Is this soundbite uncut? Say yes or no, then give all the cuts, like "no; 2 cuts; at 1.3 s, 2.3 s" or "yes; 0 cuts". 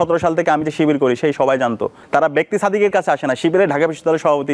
no; 1 cut; at 2.0 s